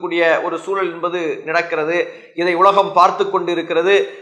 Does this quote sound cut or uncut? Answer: uncut